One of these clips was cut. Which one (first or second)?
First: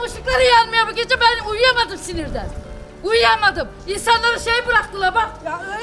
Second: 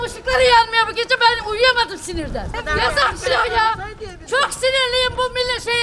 second